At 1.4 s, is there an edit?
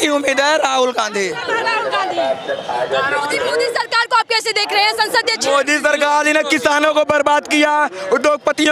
no; 0 cuts

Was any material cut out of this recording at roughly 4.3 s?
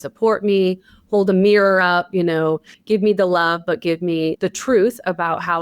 yes; 1 cut; at 4.3 s

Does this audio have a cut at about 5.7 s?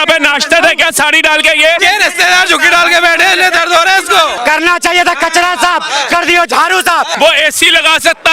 no; 3 cuts; at 1.8 s, 4.4 s, 7.1 s

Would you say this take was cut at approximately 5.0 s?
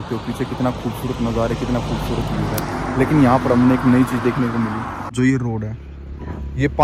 yes; 1 cut; at 5.0 s

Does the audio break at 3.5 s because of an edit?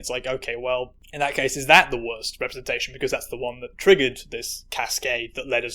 no; 1 cut; at 1.0 s

